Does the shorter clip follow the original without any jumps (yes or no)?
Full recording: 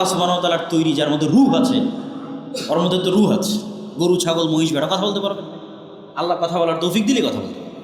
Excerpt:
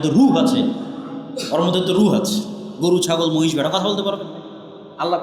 yes